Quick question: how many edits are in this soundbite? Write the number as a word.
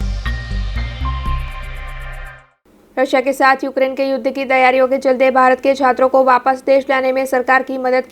one